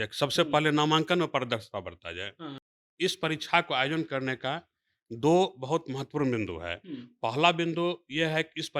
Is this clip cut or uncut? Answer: cut